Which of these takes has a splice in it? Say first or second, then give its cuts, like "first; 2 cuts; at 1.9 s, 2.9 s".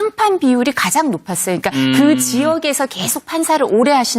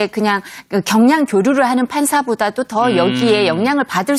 first; 1 cut; at 3.1 s